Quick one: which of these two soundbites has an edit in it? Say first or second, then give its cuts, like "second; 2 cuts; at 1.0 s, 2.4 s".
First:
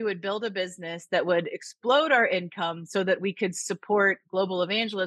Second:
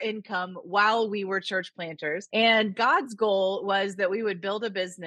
second; 1 cut; at 2.2 s